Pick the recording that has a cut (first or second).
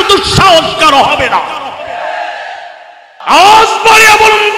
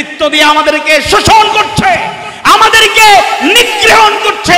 first